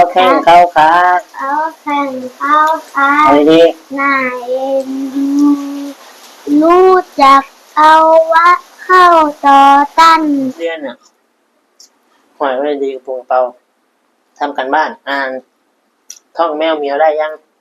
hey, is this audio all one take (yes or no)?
no